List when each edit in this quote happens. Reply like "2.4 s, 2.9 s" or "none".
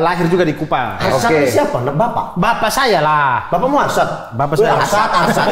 none